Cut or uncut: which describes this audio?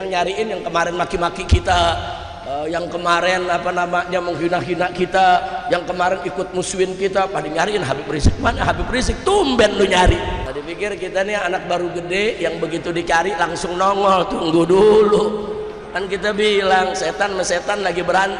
cut